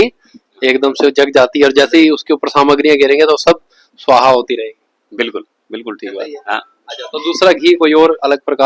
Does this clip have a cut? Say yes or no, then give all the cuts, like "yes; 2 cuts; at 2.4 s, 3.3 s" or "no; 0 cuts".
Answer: no; 0 cuts